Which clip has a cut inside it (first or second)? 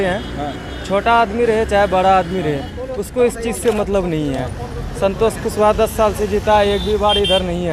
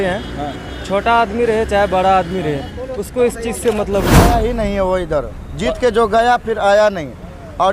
second